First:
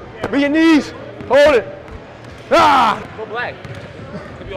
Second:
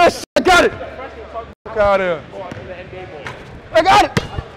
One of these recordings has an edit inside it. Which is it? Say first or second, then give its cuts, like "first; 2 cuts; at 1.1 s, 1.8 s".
first; 1 cut; at 3.0 s